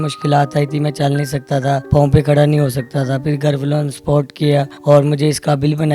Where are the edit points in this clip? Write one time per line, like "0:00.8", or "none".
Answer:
0:01.8
0:04.7